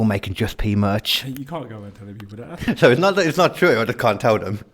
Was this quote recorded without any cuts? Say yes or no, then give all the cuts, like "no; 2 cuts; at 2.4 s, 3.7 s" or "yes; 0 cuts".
no; 1 cut; at 2.6 s